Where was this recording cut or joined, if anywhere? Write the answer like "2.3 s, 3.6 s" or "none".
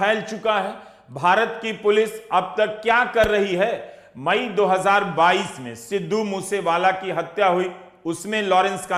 none